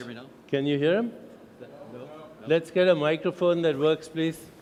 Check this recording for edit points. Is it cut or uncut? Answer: uncut